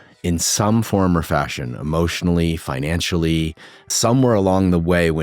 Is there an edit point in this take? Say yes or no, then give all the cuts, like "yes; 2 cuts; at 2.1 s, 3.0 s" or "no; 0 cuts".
yes; 1 cut; at 3.8 s